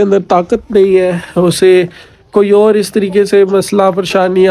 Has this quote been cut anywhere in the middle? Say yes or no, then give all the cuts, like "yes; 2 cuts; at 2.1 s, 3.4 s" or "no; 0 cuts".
no; 0 cuts